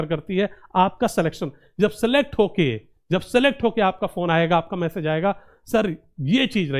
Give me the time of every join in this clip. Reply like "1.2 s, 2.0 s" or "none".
none